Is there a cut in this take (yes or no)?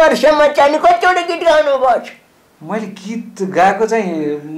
no